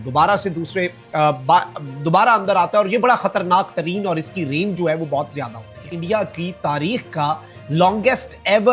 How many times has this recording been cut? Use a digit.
1